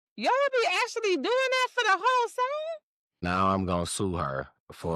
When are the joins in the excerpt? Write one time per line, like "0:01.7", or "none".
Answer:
0:03.2